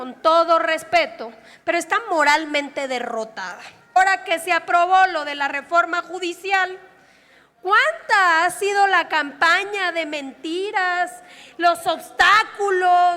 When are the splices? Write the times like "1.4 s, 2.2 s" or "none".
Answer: 4.0 s